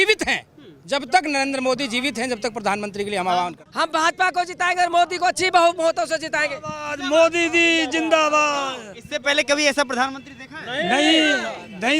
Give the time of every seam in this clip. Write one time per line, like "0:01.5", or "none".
0:03.6